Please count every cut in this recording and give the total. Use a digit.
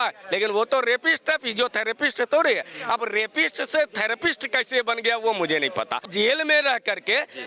1